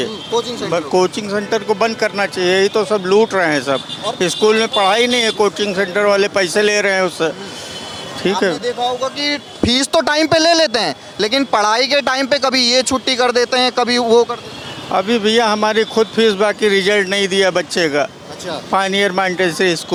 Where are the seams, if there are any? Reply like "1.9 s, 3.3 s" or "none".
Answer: none